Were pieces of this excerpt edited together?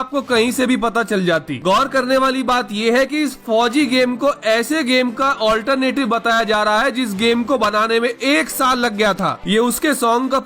yes; 1 cut; at 9.4 s

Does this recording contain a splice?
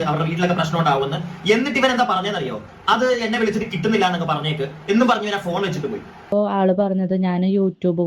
yes; 1 cut; at 6.3 s

